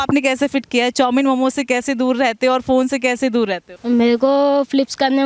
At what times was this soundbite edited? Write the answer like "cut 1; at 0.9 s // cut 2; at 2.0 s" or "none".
cut 1; at 3.7 s